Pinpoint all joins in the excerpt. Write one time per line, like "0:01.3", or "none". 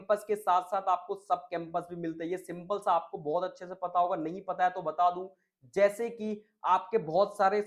none